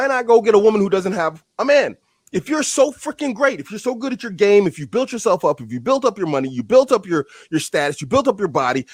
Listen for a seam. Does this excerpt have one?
no; 0 cuts

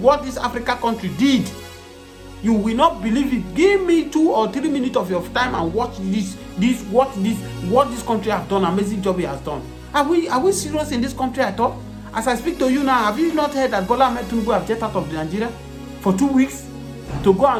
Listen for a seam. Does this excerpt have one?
no; 0 cuts

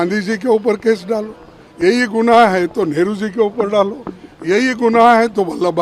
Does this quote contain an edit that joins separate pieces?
no; 0 cuts

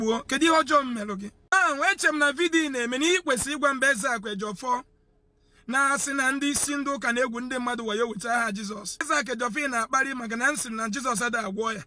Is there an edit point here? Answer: yes; 2 cuts; at 1.5 s, 9.1 s

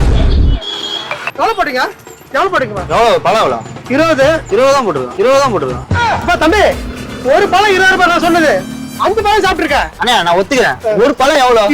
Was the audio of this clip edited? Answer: yes; 3 cuts; at 2.8 s, 4.4 s, 10.0 s

